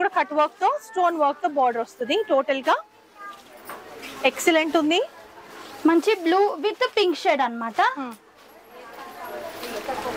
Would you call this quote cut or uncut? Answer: uncut